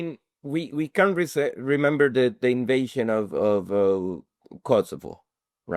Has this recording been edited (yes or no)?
no